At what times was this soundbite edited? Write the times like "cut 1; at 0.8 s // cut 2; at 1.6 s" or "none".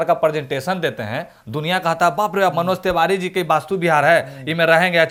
none